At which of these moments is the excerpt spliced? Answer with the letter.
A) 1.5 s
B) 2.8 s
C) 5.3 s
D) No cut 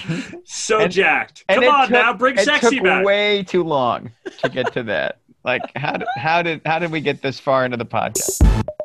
C